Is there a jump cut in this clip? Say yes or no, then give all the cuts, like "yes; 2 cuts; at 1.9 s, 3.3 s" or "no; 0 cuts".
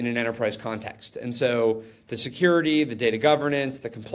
no; 0 cuts